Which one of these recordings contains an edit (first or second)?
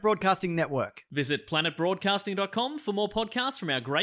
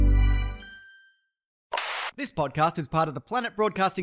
second